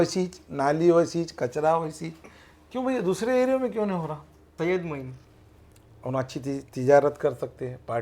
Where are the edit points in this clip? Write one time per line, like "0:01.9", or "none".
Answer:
0:04.4